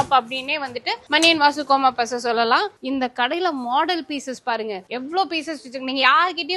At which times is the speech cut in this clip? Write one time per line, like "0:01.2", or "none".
0:02.8

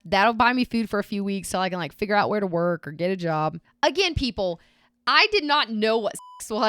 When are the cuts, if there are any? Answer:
0:03.7

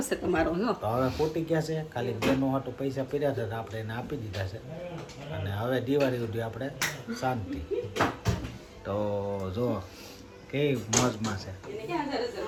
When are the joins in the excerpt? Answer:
none

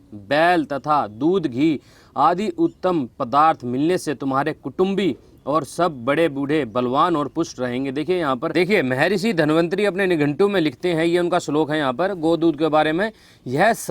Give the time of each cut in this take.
0:08.5

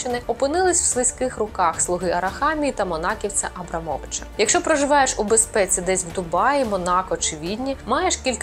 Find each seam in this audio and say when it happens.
0:04.2

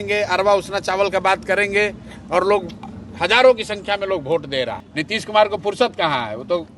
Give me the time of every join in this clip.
0:04.9

